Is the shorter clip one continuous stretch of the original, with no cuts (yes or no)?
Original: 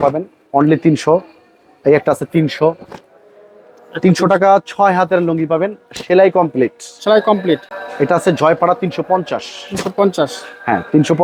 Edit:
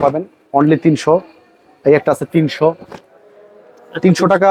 yes